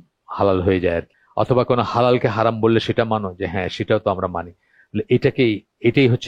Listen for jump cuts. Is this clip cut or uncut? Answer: cut